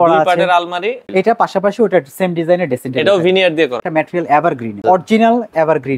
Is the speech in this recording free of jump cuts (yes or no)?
no